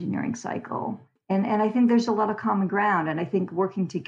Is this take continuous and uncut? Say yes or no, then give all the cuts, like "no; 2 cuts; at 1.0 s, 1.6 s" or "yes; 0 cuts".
yes; 0 cuts